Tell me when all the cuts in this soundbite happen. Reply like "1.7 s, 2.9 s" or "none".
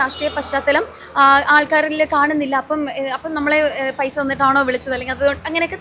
none